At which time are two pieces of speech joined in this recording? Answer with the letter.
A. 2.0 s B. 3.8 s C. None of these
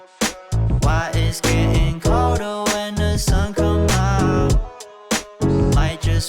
A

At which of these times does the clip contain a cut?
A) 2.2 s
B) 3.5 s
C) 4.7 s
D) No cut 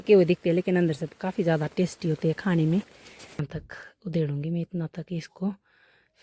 B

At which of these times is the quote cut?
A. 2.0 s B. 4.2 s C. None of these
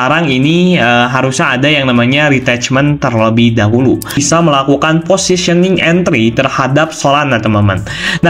B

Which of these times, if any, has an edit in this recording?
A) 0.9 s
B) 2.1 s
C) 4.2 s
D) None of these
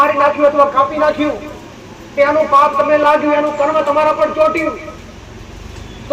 D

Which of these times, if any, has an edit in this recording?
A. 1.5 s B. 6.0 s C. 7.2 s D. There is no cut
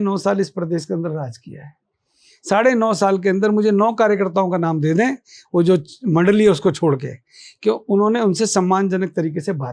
D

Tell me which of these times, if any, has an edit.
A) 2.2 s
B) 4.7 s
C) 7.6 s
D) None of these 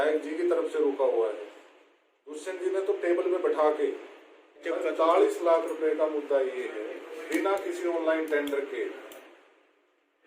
B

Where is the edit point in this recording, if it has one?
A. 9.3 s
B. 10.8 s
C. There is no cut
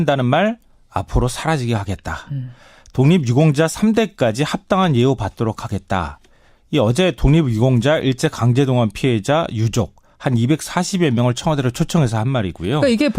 B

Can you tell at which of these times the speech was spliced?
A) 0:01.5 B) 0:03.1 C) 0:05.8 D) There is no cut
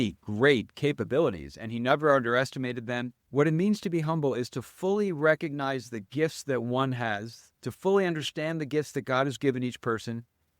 B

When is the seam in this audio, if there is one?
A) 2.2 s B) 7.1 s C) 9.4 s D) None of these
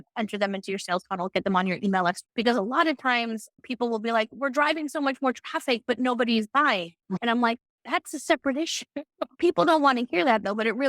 A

